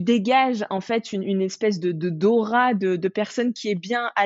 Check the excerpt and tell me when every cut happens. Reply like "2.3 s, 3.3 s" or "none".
none